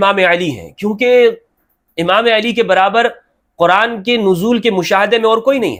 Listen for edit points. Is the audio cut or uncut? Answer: uncut